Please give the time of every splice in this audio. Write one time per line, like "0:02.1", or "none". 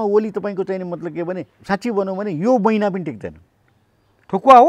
0:01.5